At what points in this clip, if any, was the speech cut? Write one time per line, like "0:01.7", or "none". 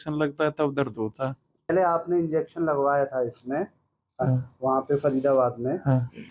0:01.7